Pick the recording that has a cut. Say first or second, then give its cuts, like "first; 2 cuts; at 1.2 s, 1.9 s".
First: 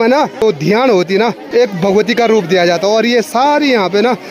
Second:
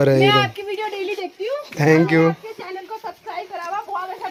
first; 1 cut; at 1.4 s